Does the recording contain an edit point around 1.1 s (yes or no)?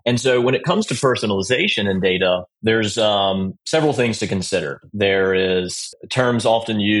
no